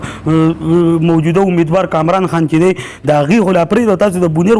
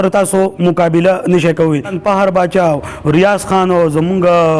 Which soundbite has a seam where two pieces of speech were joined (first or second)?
second